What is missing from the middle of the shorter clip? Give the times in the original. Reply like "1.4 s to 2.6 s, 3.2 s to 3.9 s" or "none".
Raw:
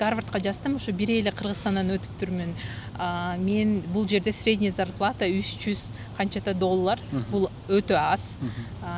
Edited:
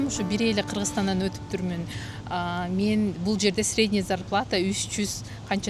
none